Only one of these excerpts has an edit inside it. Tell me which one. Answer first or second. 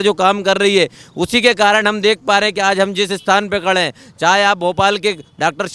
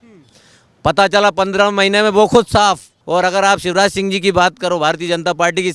second